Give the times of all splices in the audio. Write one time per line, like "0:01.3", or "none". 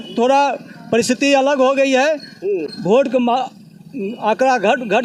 none